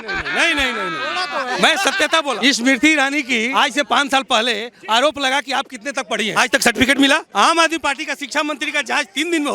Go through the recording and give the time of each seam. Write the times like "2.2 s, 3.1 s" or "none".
2.4 s, 3.5 s, 6.3 s, 7.3 s